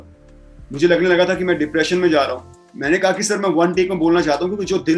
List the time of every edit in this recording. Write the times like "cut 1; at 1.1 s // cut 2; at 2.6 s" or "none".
cut 1; at 2.6 s